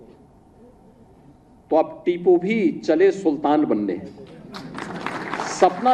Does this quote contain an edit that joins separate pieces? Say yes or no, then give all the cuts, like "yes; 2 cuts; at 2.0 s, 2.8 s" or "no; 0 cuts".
no; 0 cuts